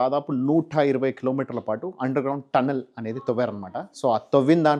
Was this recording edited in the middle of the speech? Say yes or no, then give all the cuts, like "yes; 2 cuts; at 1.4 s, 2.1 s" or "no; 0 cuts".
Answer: no; 0 cuts